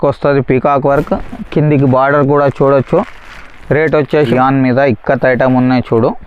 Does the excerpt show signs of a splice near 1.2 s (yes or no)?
no